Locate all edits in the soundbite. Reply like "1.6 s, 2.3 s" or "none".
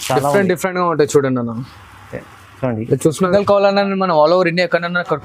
3.2 s